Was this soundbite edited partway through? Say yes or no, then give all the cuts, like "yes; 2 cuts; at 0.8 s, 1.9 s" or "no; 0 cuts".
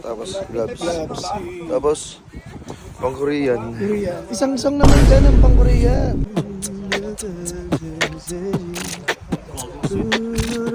yes; 1 cut; at 6.3 s